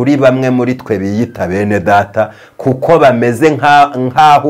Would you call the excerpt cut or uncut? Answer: uncut